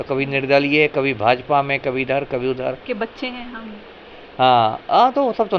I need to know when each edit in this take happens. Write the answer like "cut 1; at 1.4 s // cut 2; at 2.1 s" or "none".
cut 1; at 2.8 s